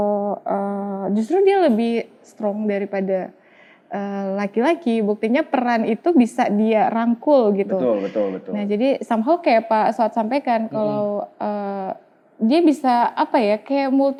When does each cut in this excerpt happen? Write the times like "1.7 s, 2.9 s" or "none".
none